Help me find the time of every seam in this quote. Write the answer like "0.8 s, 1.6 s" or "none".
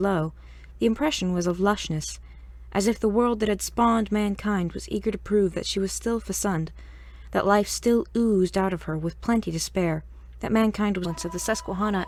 none